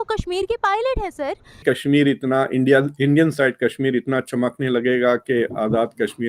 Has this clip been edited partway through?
yes; 1 cut; at 1.6 s

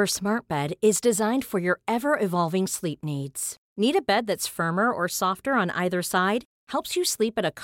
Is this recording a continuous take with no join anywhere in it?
yes; 0 cuts

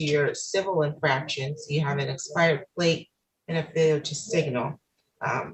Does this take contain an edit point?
no; 0 cuts

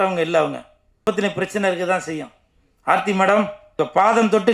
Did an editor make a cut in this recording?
yes; 2 cuts; at 1.1 s, 3.6 s

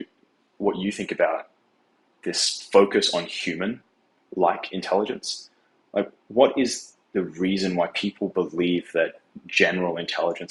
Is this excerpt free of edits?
yes; 0 cuts

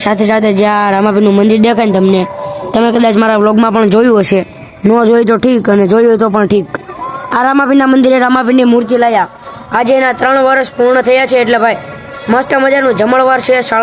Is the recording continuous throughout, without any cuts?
yes; 0 cuts

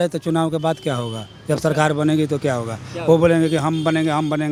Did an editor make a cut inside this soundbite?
no; 0 cuts

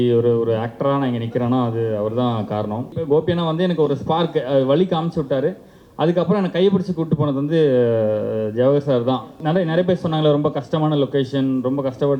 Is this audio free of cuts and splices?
no; 2 cuts; at 3.0 s, 9.3 s

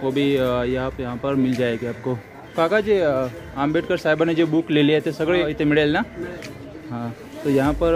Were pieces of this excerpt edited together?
yes; 2 cuts; at 2.4 s, 5.4 s

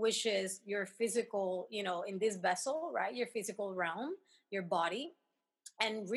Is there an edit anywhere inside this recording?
no; 0 cuts

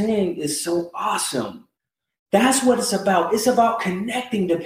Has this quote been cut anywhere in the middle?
no; 0 cuts

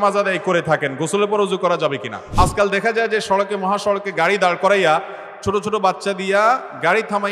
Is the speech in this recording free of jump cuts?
no; 1 cut; at 2.2 s

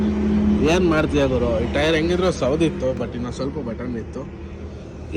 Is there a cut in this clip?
no; 0 cuts

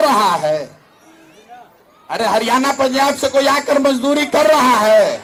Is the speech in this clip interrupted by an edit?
no; 0 cuts

